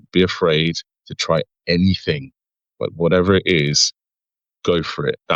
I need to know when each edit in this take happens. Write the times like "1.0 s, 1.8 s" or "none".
none